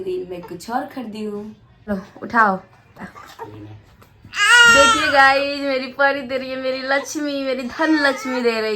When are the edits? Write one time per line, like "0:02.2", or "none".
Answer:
0:01.9
0:03.2